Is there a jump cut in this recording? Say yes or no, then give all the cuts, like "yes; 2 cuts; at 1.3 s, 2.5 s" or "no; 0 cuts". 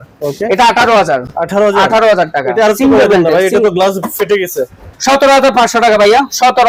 no; 0 cuts